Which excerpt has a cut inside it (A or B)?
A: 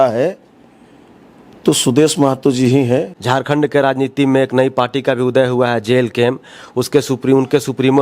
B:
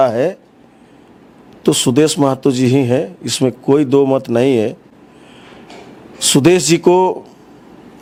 A